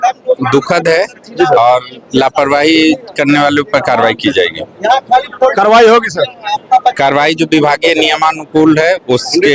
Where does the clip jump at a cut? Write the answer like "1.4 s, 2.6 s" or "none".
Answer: none